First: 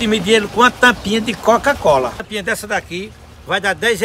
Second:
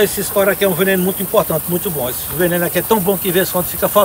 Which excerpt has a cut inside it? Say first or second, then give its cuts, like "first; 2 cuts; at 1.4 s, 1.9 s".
first; 1 cut; at 2.2 s